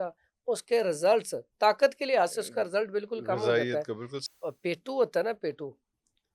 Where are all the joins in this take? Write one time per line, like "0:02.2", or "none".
0:04.4